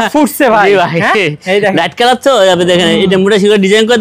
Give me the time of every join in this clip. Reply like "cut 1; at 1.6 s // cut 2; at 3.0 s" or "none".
none